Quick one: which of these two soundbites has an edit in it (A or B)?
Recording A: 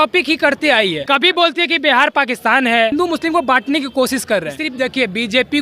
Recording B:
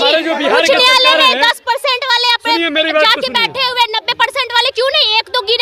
A